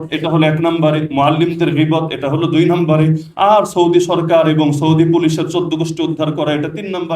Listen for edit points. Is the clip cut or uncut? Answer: uncut